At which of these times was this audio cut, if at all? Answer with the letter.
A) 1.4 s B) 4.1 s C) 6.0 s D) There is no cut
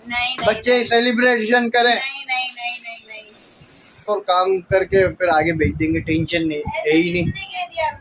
B